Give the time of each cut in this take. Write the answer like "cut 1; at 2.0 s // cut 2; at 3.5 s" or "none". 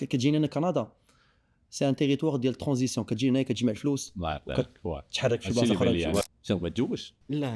cut 1; at 6.2 s